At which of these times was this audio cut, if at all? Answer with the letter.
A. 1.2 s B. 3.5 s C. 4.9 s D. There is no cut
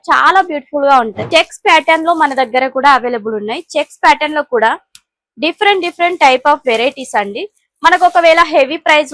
A